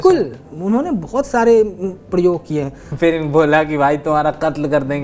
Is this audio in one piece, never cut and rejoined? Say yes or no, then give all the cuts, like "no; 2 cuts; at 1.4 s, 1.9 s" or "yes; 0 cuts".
no; 1 cut; at 2.8 s